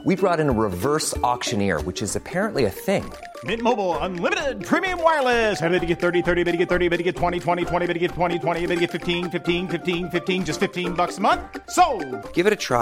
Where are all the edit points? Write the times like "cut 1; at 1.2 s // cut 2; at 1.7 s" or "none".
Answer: none